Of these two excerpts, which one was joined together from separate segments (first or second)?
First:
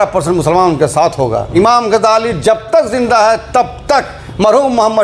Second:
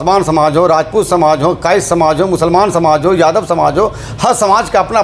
first